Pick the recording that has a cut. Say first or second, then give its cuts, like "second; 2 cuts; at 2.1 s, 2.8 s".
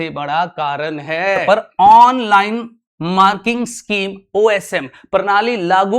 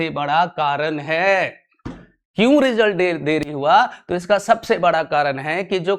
first; 1 cut; at 1.4 s